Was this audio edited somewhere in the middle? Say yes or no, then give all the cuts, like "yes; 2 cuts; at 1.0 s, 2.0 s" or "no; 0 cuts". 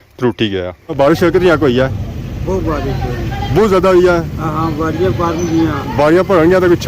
yes; 1 cut; at 0.9 s